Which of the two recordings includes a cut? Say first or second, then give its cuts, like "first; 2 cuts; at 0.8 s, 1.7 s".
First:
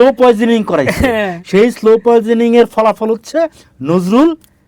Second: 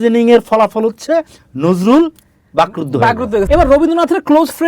second; 1 cut; at 3.5 s